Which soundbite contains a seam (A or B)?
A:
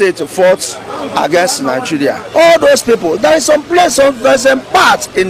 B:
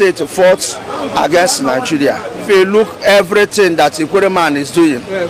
A